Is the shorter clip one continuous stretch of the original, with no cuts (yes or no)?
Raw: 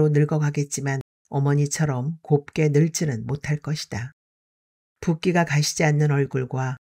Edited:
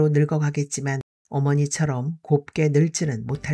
yes